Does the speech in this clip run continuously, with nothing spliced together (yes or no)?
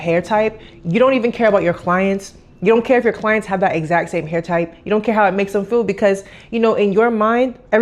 yes